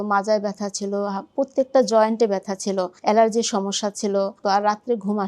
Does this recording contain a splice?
yes; 2 cuts; at 2.9 s, 4.4 s

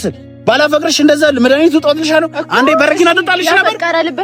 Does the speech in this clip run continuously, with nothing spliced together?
yes; 0 cuts

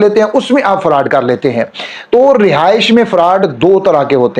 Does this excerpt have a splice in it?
no; 0 cuts

